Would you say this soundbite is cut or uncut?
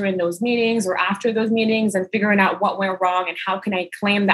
uncut